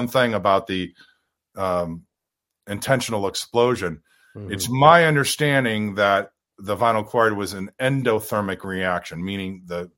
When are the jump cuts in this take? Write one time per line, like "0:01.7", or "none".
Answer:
none